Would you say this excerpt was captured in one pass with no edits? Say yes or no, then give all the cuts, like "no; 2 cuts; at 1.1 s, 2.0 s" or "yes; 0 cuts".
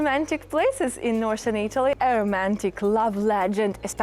no; 1 cut; at 2.0 s